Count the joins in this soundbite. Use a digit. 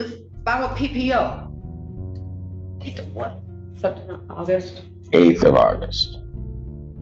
2